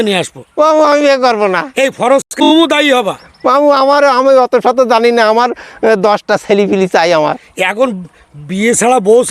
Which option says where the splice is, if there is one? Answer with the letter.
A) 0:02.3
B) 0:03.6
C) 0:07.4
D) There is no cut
A